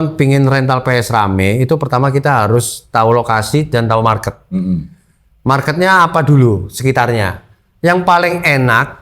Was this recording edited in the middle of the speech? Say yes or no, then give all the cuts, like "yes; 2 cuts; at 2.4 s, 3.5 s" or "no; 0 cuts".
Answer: no; 0 cuts